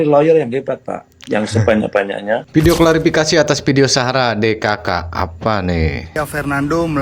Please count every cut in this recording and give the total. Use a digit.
1